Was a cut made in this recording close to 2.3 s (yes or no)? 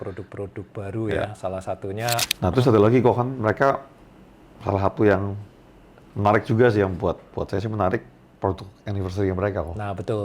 yes